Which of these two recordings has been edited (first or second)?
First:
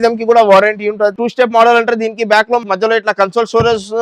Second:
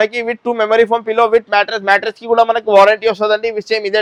first